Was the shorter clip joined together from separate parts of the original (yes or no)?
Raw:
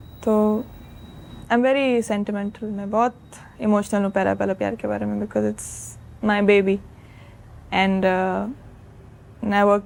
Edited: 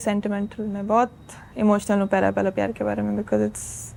no